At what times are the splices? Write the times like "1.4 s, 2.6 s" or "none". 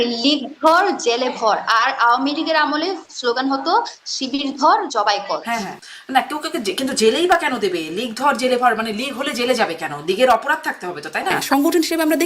5.7 s, 11.4 s